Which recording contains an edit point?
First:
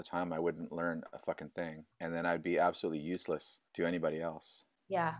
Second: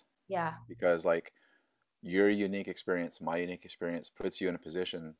first; 2 cuts; at 1.8 s, 3.6 s

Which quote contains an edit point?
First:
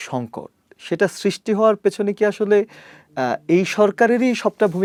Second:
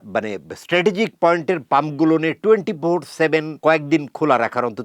second; 1 cut; at 3.5 s

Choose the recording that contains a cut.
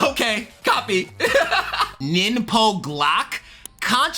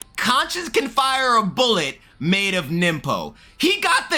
first; 1 cut; at 1.9 s

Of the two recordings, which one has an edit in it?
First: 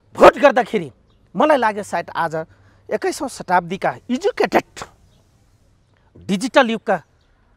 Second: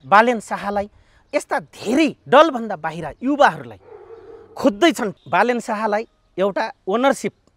second; 1 cut; at 5.1 s

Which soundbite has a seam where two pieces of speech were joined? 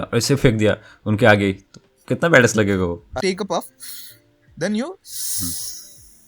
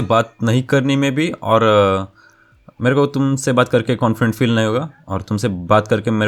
first; 1 cut; at 3.1 s

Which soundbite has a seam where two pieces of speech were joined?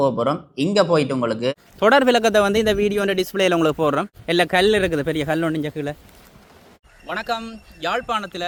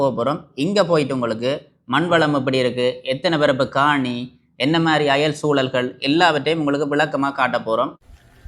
second; 1 cut; at 1.5 s

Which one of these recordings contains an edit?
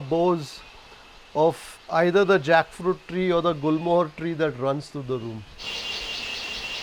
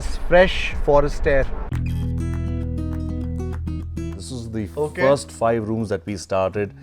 second; 2 cuts; at 1.6 s, 4.2 s

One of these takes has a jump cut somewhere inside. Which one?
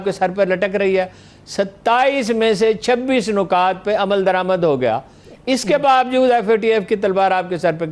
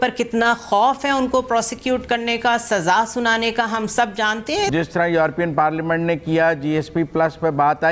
second; 1 cut; at 4.7 s

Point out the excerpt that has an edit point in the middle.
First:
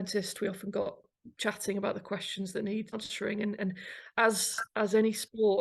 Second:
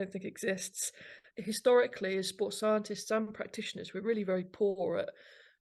first; 2 cuts; at 1.0 s, 2.9 s

